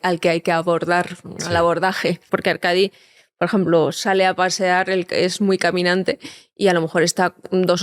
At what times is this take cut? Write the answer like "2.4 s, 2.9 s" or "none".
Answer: 2.2 s